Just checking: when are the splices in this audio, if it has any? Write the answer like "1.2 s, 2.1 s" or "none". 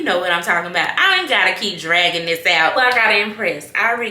2.7 s